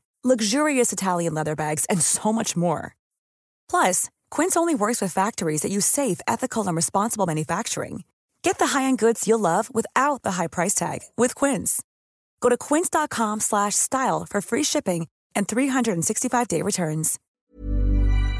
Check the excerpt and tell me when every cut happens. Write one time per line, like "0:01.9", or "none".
0:17.2